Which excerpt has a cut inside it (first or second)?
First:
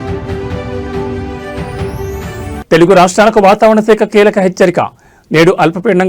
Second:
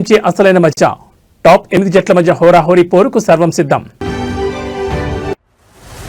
first